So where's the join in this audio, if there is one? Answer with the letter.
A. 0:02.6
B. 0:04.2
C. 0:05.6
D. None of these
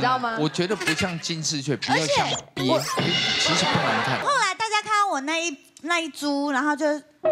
B